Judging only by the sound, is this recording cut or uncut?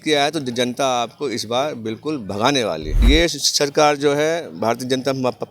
cut